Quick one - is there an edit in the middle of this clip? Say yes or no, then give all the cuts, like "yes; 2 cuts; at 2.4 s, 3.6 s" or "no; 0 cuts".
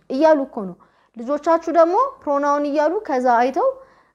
no; 0 cuts